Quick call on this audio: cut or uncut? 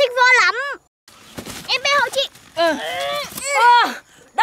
cut